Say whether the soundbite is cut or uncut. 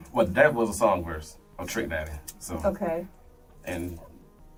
uncut